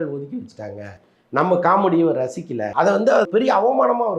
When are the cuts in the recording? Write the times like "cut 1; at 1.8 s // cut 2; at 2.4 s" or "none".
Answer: cut 1; at 2.7 s // cut 2; at 3.3 s